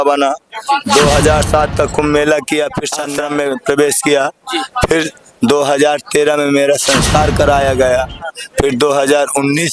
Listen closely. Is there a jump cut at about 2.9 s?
yes; 1 cut; at 2.9 s

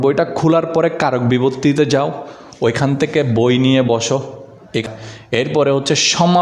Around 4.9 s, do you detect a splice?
yes; 1 cut; at 4.9 s

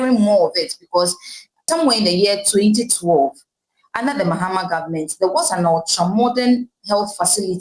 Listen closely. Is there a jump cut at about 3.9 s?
no; 1 cut; at 1.6 s

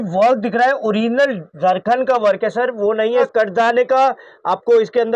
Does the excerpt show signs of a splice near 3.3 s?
yes; 1 cut; at 3.3 s

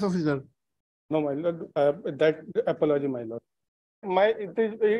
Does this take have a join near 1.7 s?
no; 1 cut; at 4.1 s

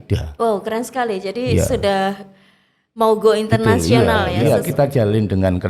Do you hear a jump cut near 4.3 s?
yes; 1 cut; at 4.3 s

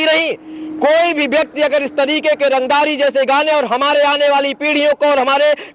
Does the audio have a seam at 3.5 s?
no; 0 cuts

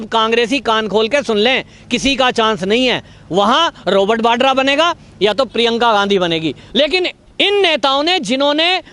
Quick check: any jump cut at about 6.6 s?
yes; 1 cut; at 6.6 s

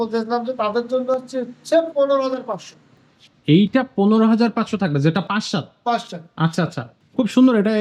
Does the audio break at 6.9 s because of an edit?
yes; 1 cut; at 6.9 s

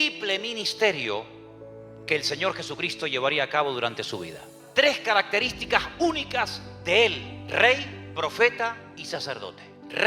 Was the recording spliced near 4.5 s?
yes; 1 cut; at 4.5 s

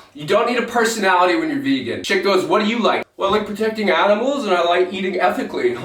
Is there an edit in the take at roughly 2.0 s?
yes; 2 cuts; at 2.0 s, 3.1 s

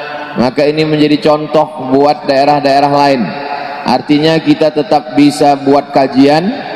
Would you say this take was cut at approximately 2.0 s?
yes; 1 cut; at 2.0 s

